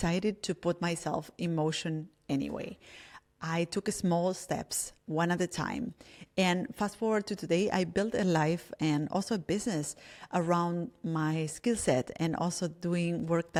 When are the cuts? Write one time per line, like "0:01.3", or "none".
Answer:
none